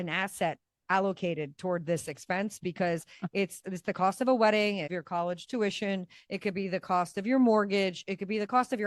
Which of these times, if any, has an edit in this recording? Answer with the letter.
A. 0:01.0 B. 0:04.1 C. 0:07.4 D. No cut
D